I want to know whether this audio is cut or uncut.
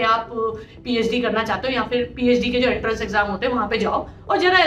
uncut